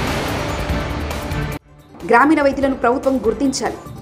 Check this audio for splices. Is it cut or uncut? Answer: cut